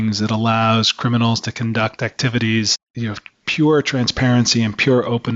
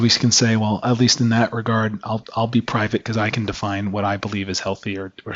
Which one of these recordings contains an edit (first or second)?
first